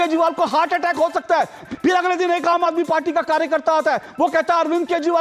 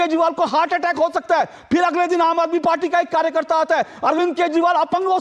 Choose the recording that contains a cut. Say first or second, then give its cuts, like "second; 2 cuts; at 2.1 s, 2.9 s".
first; 1 cut; at 1.7 s